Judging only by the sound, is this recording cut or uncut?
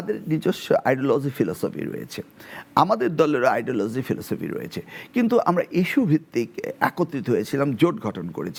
uncut